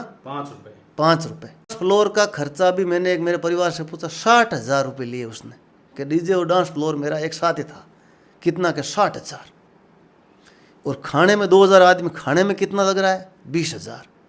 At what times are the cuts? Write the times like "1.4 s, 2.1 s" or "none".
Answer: 1.8 s